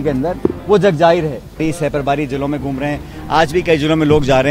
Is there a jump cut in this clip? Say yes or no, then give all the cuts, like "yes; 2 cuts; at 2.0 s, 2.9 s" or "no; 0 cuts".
yes; 1 cut; at 1.6 s